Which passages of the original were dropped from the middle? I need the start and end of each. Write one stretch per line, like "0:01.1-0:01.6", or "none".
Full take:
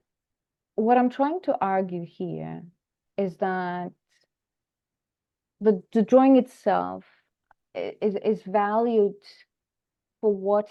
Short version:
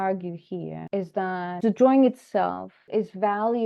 0:02.5-0:03.1
0:03.8-0:05.9
0:07.2-0:08.2